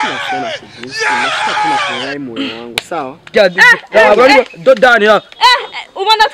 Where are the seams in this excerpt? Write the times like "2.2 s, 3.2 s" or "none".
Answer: 3.3 s